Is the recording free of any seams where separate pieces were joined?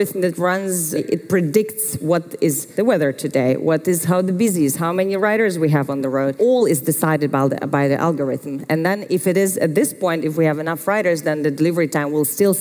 no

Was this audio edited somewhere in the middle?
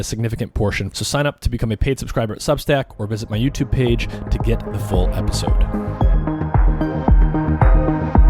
yes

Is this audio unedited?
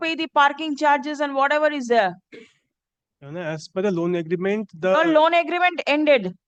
yes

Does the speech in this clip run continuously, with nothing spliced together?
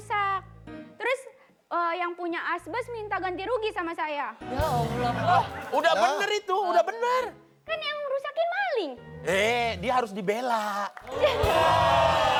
yes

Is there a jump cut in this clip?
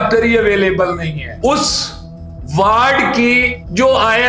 yes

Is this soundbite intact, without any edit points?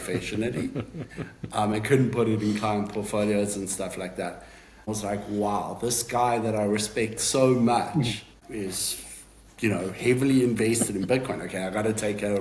no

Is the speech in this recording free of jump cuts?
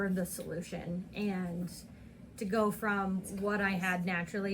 yes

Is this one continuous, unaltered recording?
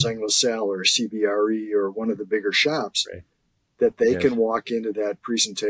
yes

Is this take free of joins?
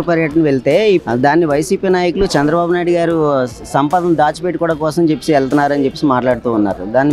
no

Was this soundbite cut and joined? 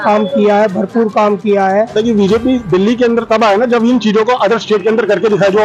yes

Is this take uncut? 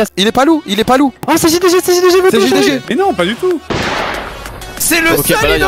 no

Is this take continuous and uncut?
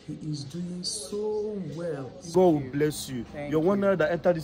no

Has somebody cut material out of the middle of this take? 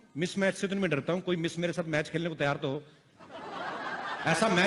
no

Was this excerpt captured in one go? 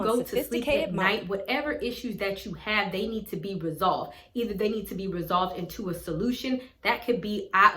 yes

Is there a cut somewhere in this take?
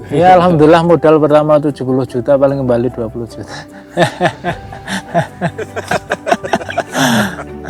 no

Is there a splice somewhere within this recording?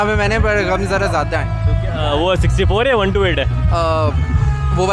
no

